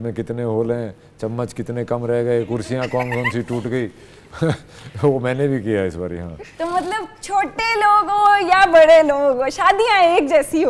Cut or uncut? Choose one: uncut